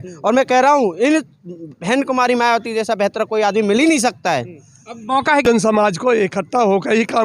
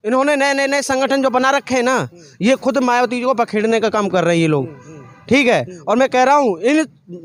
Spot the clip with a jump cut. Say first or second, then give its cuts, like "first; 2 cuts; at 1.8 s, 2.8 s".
first; 1 cut; at 5.4 s